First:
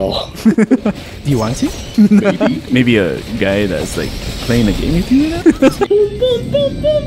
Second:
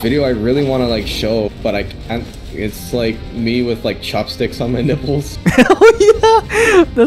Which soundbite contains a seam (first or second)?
first